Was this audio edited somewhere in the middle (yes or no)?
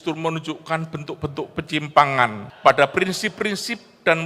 yes